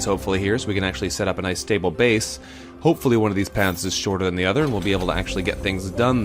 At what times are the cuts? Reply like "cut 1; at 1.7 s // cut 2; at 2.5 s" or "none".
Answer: cut 1; at 5.1 s